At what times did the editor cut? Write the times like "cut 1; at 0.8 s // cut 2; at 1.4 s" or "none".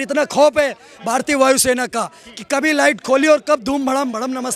none